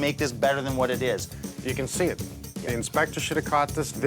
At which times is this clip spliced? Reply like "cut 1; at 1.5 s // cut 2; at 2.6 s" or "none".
cut 1; at 1.3 s